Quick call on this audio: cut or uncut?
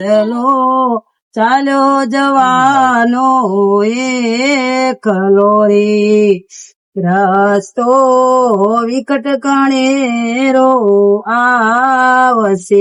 uncut